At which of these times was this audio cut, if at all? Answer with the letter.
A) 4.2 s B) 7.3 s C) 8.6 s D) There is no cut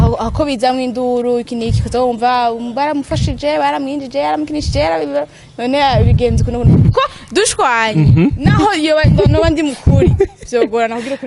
D